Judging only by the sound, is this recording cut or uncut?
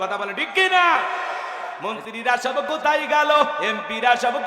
cut